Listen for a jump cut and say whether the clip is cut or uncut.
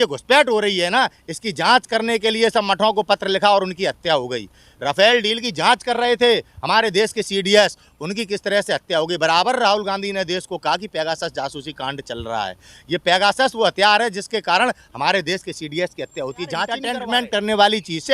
cut